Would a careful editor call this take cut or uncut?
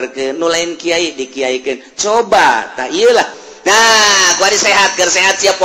cut